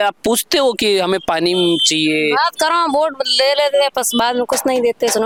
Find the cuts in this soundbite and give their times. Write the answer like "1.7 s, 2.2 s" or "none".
none